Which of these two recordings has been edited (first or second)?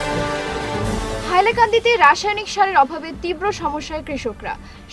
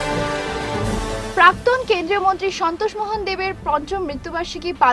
first